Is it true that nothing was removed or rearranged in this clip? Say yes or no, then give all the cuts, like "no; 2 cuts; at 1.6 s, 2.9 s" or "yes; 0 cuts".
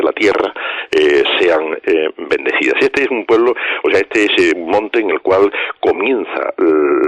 yes; 0 cuts